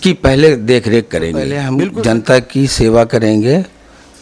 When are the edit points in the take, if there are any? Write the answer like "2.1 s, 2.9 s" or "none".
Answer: 1.6 s

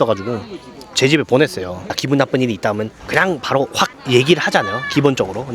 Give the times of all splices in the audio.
1.9 s, 3.0 s, 4.0 s

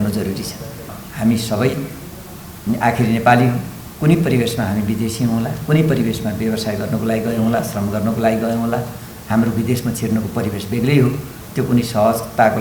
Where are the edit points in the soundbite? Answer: 1.0 s

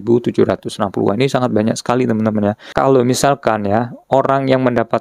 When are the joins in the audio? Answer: 2.6 s

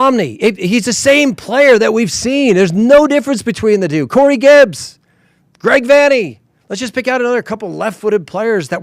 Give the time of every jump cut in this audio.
none

